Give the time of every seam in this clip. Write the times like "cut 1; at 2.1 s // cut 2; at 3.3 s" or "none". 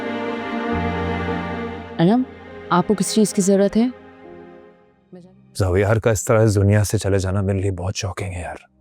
cut 1; at 5.1 s